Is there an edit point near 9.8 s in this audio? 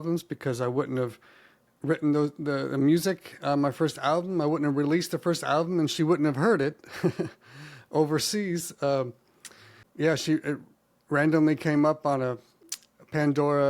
yes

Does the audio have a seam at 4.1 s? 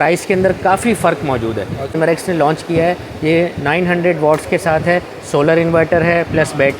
no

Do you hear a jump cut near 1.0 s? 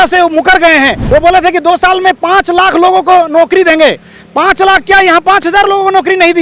yes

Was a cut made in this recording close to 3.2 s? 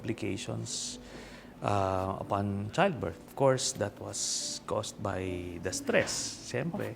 yes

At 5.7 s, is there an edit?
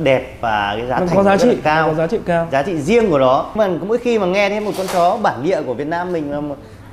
no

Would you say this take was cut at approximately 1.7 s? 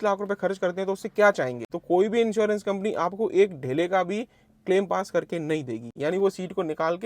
yes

